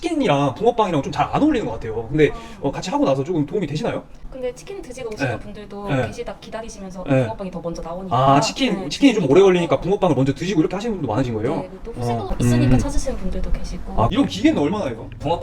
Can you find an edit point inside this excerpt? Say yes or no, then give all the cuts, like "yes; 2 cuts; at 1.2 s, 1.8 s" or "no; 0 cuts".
no; 0 cuts